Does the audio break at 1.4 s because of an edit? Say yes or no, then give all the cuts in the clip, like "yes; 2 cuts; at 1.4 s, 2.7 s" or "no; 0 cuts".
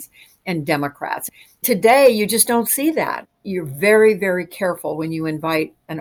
yes; 1 cut; at 1.4 s